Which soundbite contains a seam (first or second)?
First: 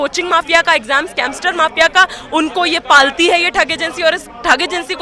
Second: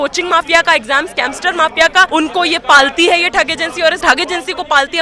second